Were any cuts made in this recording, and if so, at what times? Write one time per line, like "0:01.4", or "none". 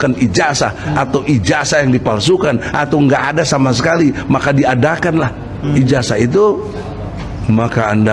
none

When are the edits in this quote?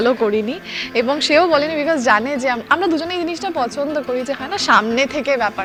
none

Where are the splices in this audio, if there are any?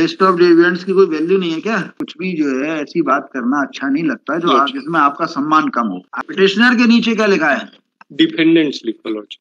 0:02.0
0:06.3

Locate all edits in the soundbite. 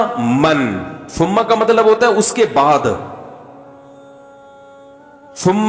none

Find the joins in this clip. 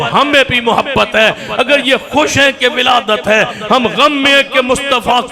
none

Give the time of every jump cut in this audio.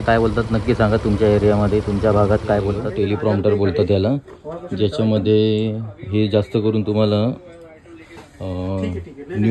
0:02.8

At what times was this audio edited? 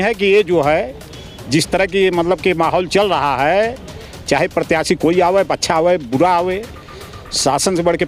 none

